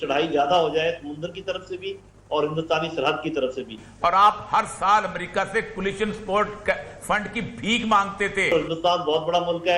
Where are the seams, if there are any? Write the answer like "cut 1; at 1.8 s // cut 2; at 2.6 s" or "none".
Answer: cut 1; at 3.8 s // cut 2; at 8.5 s